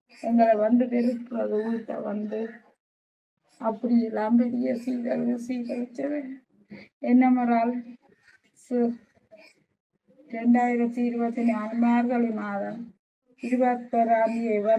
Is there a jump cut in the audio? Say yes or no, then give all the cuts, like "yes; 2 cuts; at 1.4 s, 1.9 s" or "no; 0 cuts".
no; 0 cuts